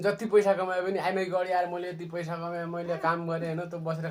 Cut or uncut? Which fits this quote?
uncut